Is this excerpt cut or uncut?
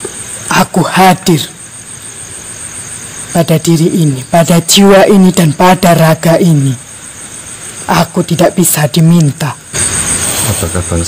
cut